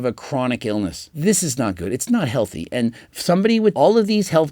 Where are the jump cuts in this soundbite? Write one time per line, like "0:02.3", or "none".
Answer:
0:01.1
0:03.7